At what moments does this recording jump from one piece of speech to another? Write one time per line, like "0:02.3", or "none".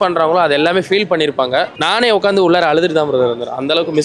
0:01.8